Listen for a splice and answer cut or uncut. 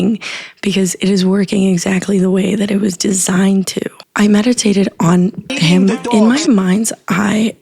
cut